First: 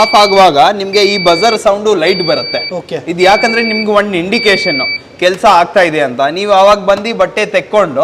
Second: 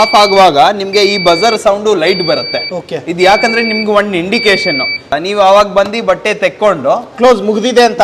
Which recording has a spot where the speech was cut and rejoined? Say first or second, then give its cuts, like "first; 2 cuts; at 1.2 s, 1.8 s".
second; 1 cut; at 5.1 s